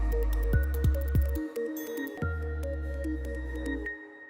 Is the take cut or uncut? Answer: cut